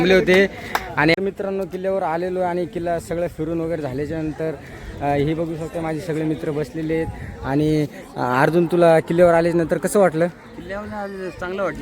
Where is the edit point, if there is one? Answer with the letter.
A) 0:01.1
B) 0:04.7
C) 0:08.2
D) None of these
A